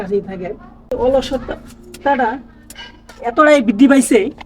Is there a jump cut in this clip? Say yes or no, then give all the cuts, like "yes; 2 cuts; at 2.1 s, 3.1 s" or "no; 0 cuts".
yes; 1 cut; at 0.9 s